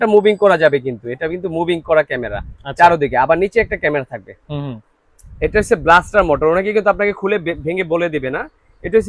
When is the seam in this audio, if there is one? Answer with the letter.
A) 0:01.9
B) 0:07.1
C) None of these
C